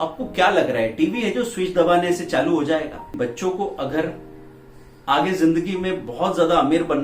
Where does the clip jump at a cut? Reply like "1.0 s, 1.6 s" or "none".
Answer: 3.1 s